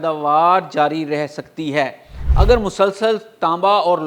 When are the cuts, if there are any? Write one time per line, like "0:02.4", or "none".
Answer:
0:02.2